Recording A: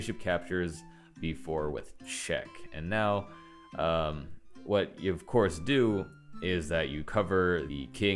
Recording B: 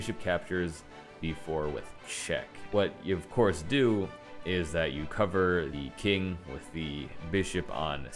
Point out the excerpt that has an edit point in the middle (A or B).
B